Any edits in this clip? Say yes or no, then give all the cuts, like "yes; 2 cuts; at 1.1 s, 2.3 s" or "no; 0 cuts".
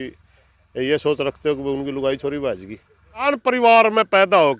yes; 1 cut; at 3.3 s